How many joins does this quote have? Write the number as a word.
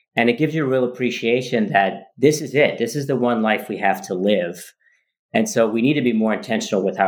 zero